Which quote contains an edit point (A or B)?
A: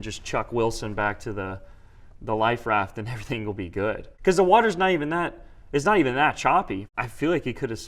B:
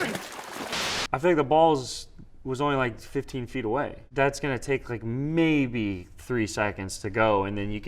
A